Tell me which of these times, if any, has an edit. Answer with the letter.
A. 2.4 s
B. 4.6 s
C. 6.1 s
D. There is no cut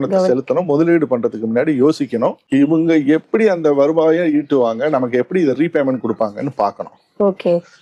D